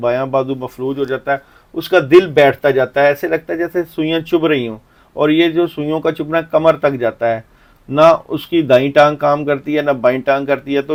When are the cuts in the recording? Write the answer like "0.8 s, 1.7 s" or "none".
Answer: none

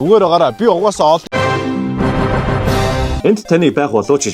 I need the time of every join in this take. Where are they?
1.3 s, 2.9 s

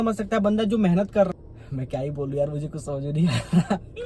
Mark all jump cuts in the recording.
1.3 s

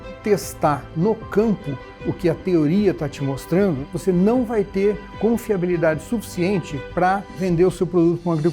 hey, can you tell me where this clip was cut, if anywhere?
3.8 s, 7.4 s

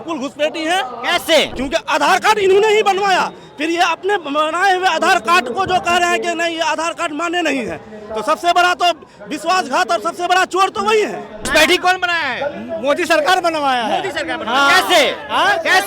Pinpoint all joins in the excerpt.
1.5 s, 11.5 s

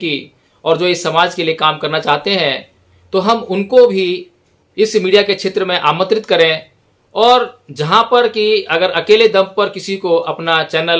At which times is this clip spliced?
none

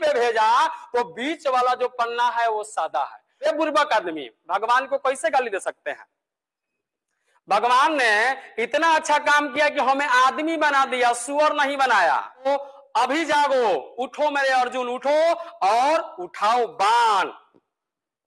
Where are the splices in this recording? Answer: 3.2 s, 12.5 s

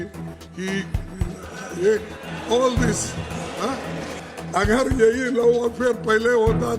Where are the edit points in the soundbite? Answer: 4.2 s

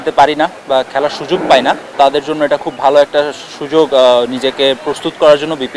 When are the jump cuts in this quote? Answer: 1.9 s

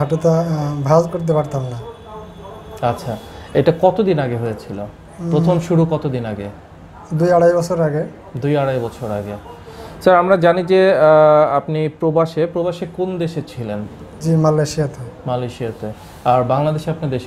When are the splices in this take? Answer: none

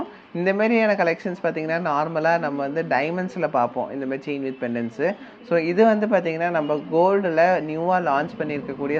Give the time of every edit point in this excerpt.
none

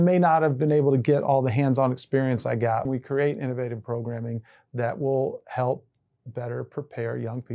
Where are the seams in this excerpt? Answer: 2.9 s

